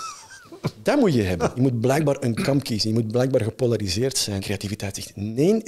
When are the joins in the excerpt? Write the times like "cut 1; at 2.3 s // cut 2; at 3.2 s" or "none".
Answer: cut 1; at 1.5 s // cut 2; at 4.4 s